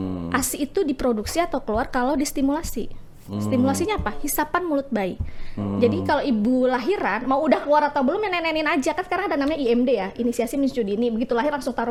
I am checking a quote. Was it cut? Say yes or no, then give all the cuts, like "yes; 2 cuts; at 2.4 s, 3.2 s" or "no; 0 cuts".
no; 0 cuts